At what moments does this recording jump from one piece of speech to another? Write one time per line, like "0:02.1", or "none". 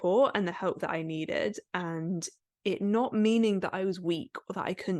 none